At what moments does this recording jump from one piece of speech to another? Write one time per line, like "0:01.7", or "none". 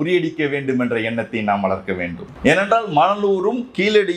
0:02.2